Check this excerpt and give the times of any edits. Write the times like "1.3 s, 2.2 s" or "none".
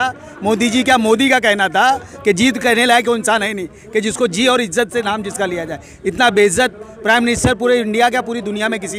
none